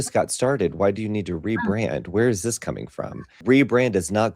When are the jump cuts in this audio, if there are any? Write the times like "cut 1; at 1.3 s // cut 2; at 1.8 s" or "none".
cut 1; at 3.4 s